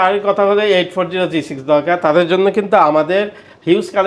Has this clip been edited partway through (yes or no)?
no